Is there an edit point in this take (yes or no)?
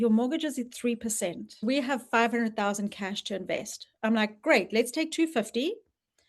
yes